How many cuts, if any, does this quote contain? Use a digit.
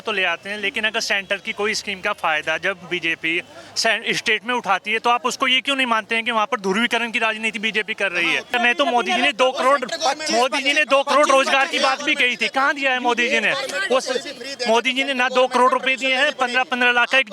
1